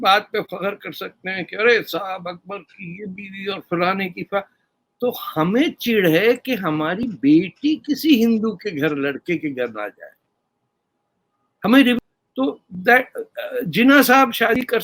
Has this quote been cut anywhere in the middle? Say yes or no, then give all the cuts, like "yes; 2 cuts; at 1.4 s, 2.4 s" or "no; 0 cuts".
yes; 1 cut; at 12.0 s